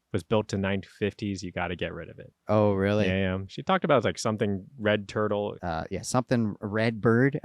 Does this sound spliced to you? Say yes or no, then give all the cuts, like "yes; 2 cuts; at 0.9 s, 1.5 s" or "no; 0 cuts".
yes; 2 cuts; at 2.3 s, 5.6 s